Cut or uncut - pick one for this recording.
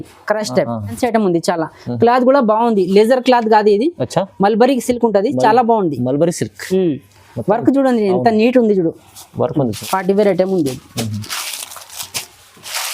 cut